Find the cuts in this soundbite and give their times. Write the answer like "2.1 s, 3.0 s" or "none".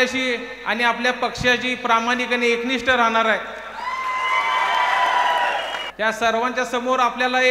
5.8 s